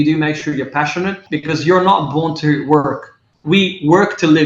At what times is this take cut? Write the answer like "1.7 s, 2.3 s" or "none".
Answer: 1.2 s